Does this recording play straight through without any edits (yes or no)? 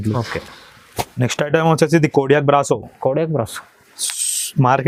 yes